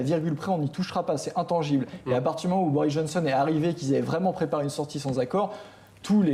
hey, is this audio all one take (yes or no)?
yes